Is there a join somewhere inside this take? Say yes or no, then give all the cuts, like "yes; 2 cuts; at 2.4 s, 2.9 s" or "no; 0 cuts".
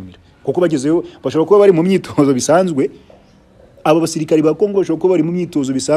no; 0 cuts